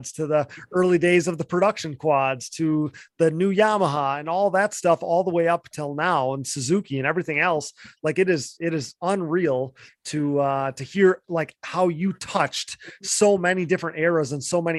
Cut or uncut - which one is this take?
uncut